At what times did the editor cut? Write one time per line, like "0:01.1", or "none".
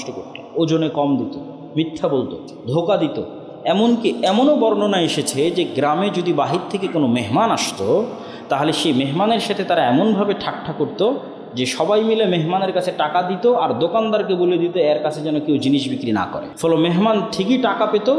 0:16.4